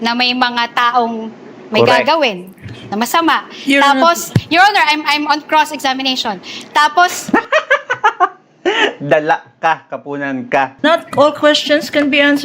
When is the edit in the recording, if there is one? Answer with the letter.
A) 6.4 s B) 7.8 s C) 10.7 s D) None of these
C